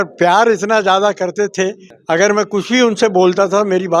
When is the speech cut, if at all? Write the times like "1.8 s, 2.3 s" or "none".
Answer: 1.9 s